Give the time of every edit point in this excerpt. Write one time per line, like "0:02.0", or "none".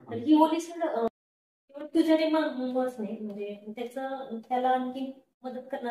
0:01.1